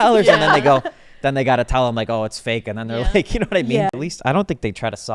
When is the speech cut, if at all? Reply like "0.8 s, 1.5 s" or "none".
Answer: 3.9 s